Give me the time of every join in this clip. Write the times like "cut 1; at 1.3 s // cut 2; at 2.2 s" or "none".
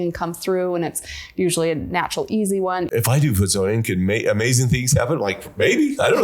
cut 1; at 2.9 s